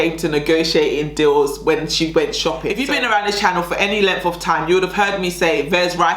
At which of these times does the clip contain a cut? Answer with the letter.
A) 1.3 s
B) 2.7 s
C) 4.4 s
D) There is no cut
B